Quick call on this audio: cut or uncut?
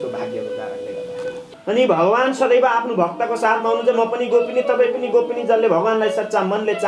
cut